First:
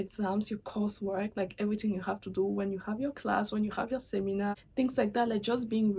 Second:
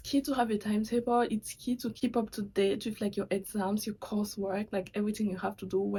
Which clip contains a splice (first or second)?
first